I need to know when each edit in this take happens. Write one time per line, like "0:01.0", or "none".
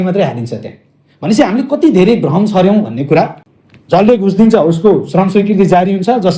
0:03.4